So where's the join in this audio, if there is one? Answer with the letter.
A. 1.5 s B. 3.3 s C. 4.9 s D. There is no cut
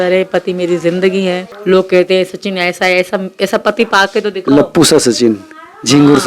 A